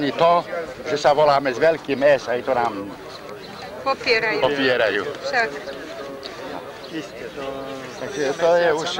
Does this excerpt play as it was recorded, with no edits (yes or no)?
no